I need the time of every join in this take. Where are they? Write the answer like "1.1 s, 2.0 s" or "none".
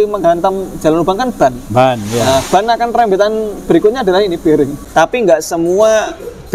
4.8 s